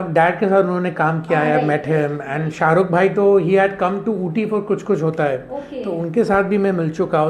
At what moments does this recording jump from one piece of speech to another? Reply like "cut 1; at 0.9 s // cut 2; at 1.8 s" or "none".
cut 1; at 1.6 s // cut 2; at 5.2 s